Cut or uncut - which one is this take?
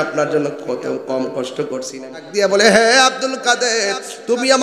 cut